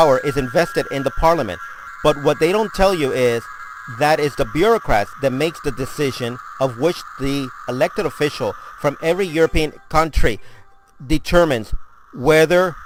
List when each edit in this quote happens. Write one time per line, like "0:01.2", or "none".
none